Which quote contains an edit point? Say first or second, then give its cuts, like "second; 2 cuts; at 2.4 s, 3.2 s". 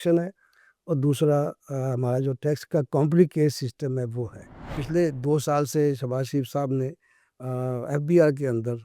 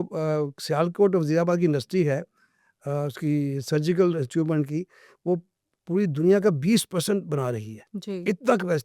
first; 1 cut; at 4.8 s